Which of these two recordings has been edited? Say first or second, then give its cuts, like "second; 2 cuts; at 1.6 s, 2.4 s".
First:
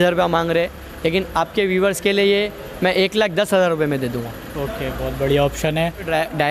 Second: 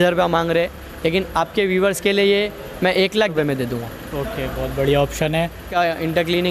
second; 2 cuts; at 3.3 s, 5.7 s